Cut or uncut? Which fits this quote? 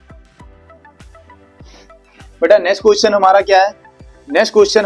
uncut